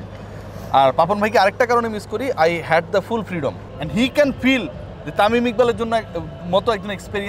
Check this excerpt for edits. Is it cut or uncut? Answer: cut